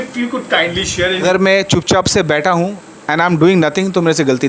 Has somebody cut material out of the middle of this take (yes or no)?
yes